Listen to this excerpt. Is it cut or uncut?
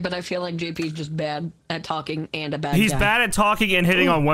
cut